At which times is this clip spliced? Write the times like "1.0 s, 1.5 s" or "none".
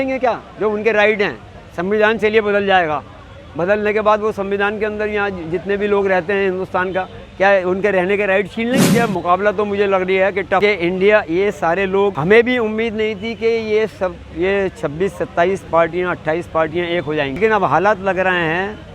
8.9 s, 10.6 s, 12.2 s, 17.4 s